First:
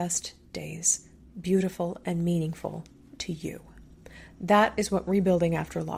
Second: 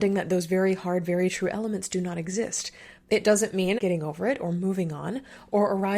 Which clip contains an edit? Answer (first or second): second